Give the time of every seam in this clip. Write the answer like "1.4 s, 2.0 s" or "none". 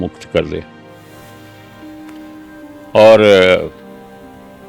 none